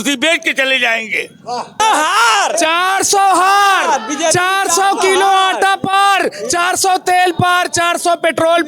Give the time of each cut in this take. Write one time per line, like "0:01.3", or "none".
0:01.8